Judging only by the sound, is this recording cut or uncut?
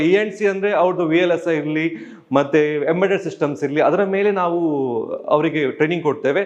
uncut